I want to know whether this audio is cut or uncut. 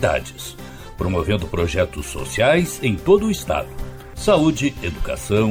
uncut